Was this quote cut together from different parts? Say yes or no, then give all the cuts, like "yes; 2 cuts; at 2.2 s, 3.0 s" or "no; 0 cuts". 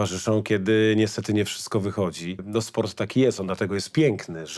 yes; 1 cut; at 2.4 s